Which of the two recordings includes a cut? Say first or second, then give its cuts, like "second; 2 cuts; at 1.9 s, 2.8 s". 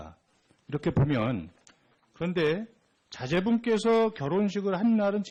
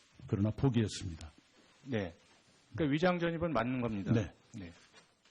second; 1 cut; at 3.0 s